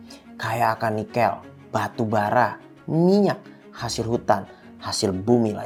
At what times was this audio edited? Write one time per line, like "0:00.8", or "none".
none

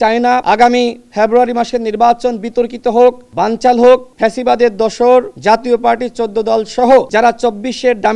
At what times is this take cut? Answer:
0:04.1

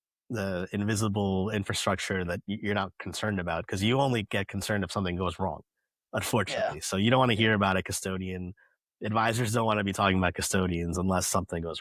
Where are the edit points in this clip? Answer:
none

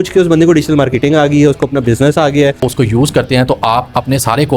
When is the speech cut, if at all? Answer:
0:02.6

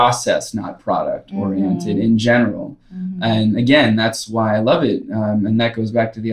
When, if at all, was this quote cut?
none

